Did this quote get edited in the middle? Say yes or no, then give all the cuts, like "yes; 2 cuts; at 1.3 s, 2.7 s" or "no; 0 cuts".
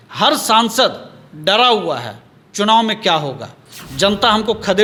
no; 0 cuts